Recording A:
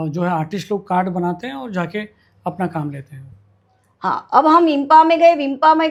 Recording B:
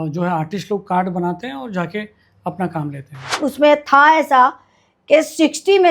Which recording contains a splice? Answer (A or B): B